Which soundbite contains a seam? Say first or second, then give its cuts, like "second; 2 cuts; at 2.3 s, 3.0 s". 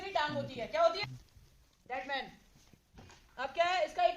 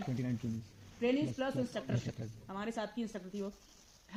first; 1 cut; at 1.0 s